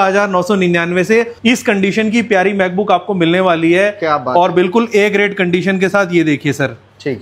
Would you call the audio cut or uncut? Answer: cut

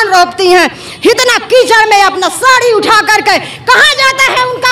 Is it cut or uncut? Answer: uncut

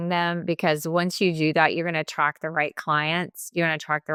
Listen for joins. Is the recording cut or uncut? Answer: uncut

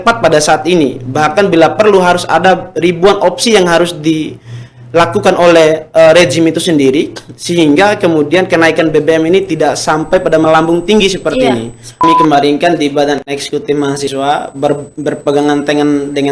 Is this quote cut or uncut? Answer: cut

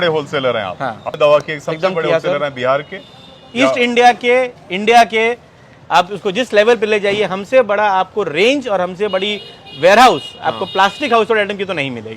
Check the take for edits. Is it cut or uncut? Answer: cut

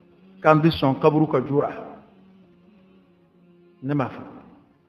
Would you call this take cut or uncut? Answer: uncut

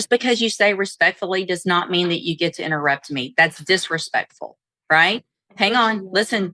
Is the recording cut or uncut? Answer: uncut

